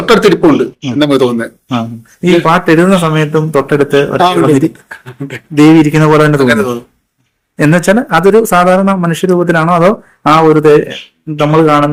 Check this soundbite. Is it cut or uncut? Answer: uncut